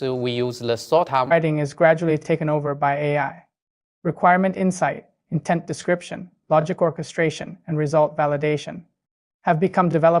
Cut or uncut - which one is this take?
cut